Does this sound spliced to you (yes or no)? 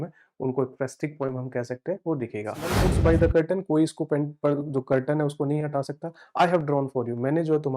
yes